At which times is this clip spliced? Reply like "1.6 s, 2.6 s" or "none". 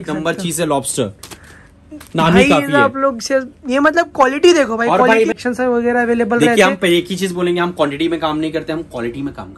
none